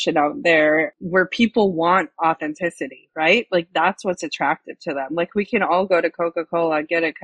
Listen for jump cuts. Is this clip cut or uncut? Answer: cut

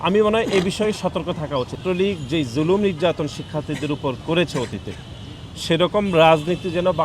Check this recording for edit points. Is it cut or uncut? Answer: cut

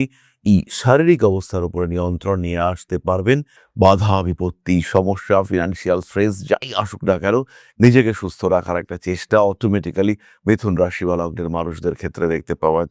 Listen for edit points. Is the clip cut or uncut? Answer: uncut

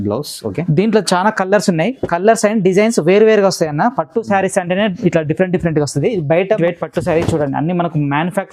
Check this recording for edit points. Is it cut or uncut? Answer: cut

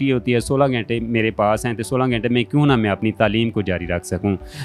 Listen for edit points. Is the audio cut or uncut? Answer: uncut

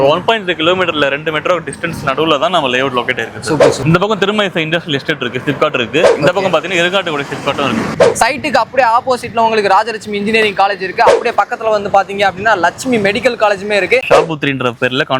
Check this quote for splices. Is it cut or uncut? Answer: cut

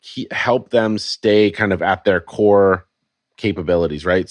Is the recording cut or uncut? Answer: uncut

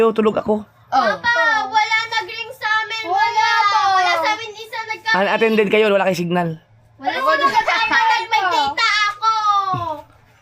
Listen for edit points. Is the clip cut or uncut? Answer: uncut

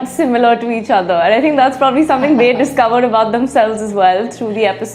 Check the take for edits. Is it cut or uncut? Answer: uncut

